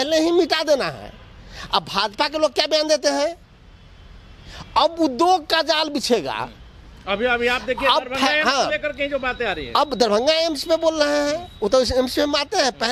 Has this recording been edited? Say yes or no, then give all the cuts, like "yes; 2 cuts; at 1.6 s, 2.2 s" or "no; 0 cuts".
no; 0 cuts